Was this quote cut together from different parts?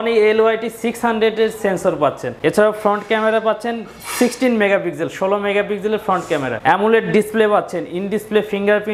no; 0 cuts

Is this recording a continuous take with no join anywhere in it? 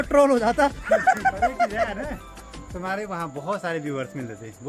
yes; 0 cuts

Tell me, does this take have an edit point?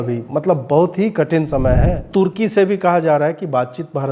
yes; 1 cut; at 2.1 s

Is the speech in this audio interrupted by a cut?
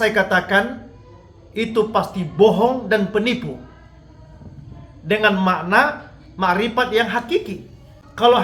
yes; 1 cut; at 7.5 s

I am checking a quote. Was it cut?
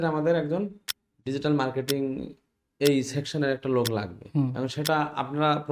no; 0 cuts

